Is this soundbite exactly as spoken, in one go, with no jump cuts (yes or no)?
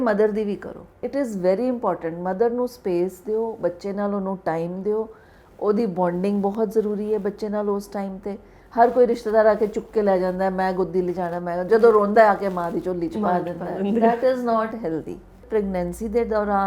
no